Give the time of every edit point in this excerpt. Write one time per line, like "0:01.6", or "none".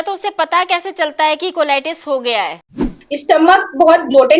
0:02.9